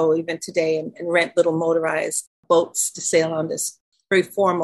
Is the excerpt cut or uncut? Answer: cut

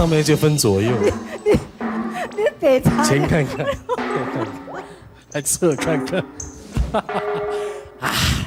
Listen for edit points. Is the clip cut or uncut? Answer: uncut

